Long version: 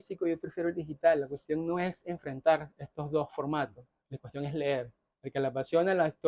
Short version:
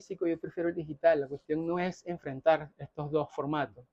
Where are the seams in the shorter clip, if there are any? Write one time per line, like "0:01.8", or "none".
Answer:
none